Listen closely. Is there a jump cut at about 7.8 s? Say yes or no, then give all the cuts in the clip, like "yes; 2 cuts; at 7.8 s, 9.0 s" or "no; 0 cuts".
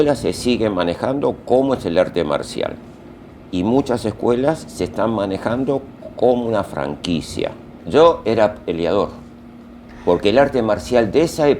yes; 1 cut; at 7.8 s